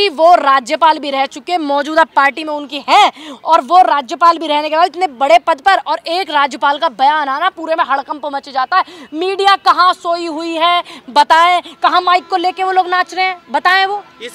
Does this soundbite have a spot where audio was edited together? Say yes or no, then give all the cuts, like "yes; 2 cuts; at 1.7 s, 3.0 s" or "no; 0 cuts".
no; 0 cuts